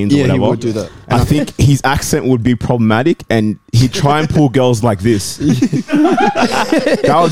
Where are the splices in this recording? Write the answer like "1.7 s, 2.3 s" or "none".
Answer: 1.0 s